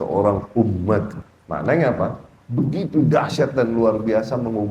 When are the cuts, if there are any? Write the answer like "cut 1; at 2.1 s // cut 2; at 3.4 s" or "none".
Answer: cut 1; at 1.2 s